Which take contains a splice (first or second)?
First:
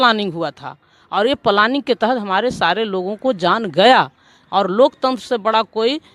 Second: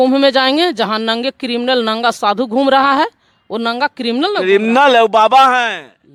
first